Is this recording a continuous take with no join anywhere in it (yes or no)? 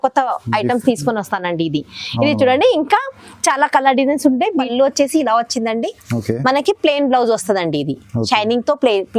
no